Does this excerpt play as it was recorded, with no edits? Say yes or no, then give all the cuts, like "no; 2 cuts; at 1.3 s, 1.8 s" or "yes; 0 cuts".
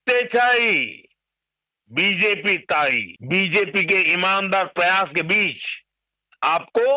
no; 1 cut; at 3.1 s